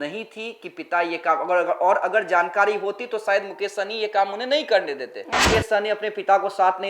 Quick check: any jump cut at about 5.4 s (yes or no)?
yes